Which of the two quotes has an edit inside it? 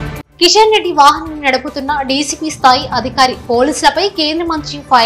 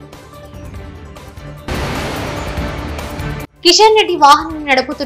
second; 1 cut; at 1.0 s

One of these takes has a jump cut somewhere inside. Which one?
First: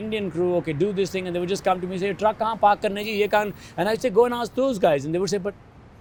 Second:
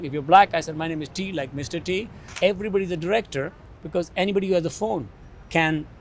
second; 1 cut; at 2.3 s

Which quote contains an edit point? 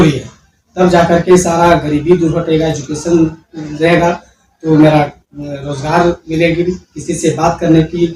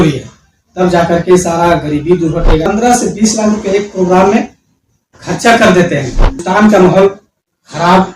second; 2 cuts; at 2.7 s, 6.4 s

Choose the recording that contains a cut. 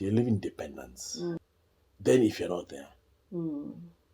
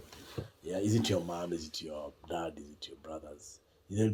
first; 1 cut; at 1.4 s

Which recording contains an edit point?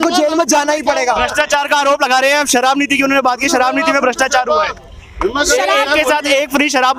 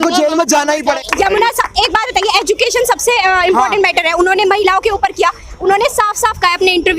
second; 1 cut; at 1.0 s

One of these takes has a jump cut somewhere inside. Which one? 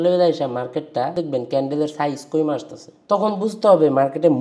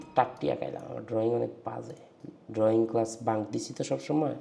first; 1 cut; at 1.1 s

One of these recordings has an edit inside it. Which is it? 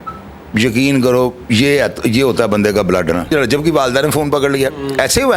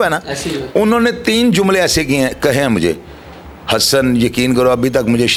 first; 1 cut; at 3.3 s

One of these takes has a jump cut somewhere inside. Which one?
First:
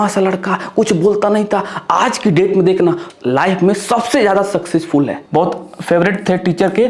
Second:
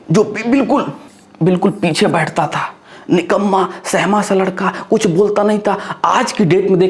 first; 1 cut; at 5.2 s

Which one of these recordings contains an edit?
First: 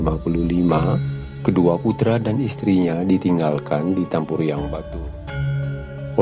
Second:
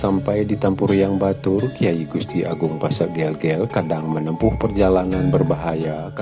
first; 1 cut; at 4.7 s

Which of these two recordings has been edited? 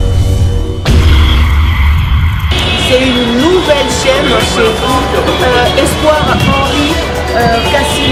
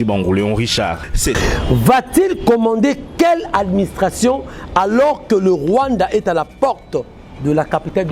second; 1 cut; at 1.4 s

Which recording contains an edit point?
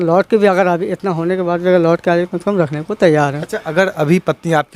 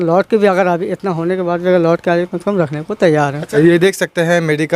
second; 1 cut; at 3.4 s

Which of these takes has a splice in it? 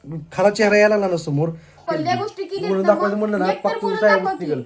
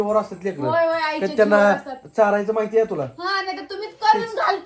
first; 1 cut; at 1.8 s

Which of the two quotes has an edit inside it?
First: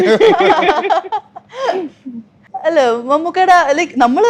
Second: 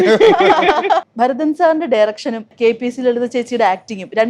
second; 2 cuts; at 1.1 s, 2.5 s

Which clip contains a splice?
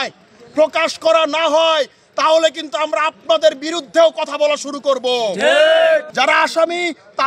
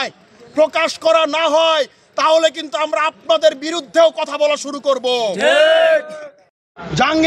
first; 1 cut; at 6.1 s

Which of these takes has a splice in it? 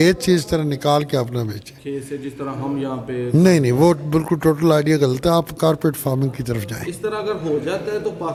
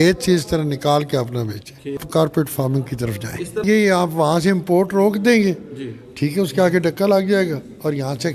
second; 2 cuts; at 2.0 s, 3.6 s

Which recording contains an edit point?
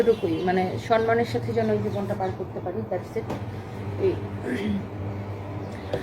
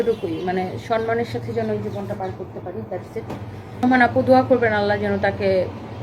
second; 1 cut; at 3.8 s

